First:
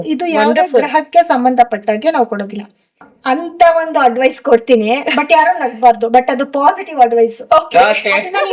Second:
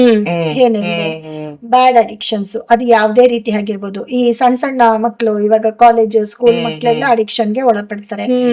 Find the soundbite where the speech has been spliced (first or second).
first